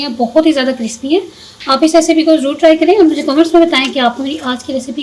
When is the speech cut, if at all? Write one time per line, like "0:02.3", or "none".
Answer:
none